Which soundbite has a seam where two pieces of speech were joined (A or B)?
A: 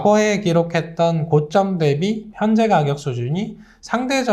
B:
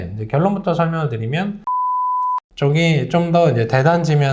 B